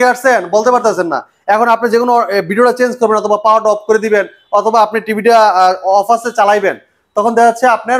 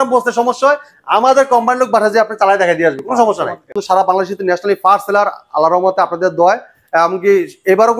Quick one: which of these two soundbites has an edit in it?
second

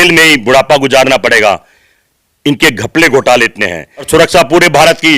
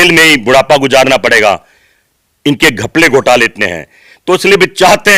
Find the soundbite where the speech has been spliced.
first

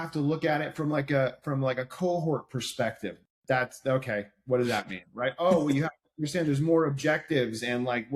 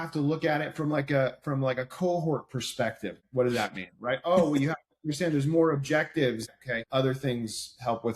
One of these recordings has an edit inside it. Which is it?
second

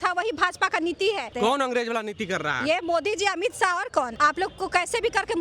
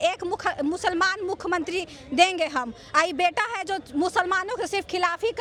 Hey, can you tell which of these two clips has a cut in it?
first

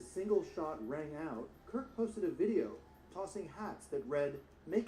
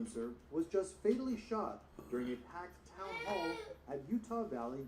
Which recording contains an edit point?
first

